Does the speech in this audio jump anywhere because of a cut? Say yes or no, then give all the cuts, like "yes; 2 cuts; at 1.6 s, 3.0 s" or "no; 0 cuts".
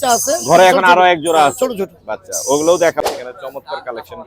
yes; 1 cut; at 3.0 s